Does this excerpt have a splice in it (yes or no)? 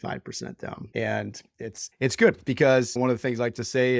yes